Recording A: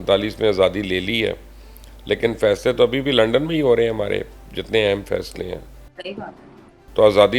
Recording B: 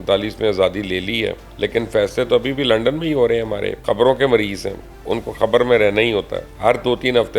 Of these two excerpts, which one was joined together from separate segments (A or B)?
B